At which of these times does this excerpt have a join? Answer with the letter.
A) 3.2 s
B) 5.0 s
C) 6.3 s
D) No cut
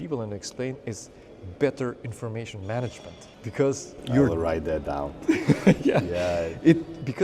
A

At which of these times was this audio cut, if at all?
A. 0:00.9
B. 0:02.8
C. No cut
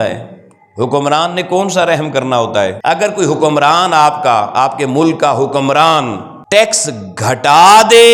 B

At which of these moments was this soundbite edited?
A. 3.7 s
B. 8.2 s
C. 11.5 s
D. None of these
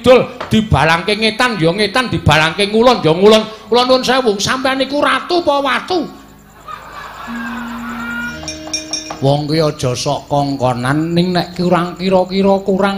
B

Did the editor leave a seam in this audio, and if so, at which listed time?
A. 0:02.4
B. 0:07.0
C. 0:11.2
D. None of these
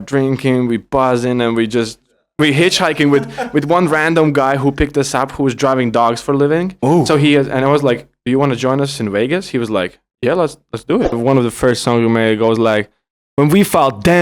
C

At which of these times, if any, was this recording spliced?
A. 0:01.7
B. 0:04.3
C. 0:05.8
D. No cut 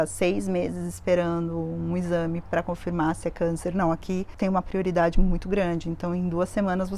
B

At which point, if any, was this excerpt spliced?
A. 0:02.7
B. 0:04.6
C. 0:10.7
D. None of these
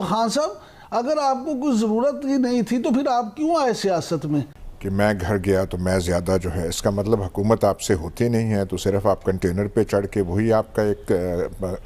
B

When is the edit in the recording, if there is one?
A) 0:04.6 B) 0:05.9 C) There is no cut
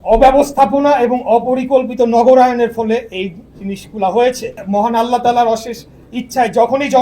A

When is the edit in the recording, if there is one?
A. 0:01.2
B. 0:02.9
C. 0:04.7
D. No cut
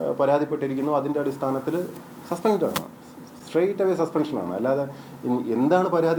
D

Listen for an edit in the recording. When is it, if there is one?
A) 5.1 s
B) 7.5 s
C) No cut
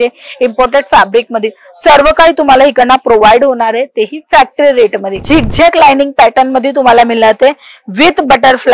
A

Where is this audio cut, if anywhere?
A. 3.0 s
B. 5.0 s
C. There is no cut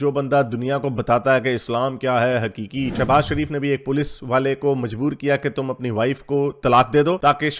A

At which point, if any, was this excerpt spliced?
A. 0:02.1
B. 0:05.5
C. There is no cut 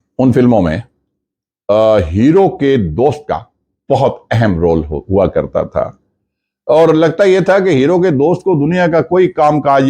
C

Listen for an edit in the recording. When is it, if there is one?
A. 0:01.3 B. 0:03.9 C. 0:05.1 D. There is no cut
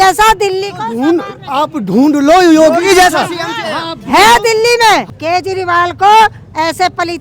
C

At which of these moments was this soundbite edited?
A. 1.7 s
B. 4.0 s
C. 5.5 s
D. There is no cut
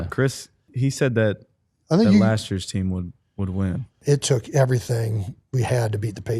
B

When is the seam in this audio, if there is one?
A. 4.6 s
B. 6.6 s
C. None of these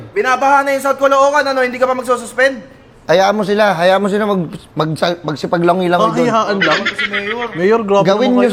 C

